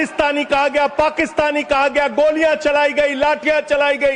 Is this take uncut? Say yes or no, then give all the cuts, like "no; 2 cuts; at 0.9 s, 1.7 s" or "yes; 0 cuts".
yes; 0 cuts